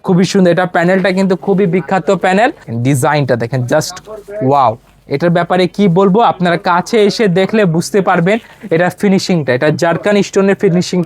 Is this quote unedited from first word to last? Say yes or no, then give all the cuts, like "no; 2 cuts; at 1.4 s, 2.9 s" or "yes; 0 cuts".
no; 1 cut; at 2.7 s